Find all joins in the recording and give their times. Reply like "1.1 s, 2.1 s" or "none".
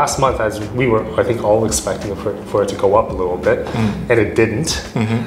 none